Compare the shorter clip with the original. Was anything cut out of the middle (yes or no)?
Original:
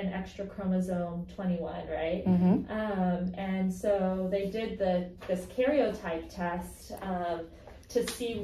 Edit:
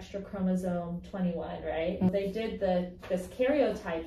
yes